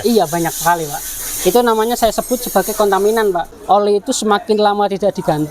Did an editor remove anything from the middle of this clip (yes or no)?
yes